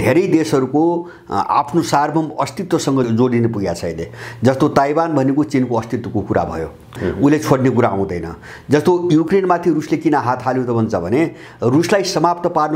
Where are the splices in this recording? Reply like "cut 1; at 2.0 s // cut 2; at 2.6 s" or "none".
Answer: cut 1; at 3.1 s // cut 2; at 6.9 s // cut 3; at 9.3 s